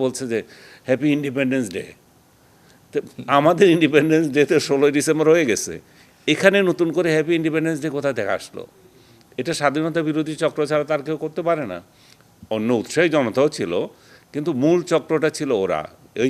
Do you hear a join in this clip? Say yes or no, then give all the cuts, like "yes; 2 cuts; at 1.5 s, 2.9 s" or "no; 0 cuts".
no; 0 cuts